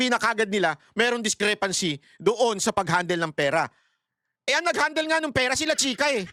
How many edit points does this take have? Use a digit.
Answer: 0